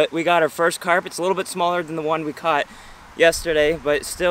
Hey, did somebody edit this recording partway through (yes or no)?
no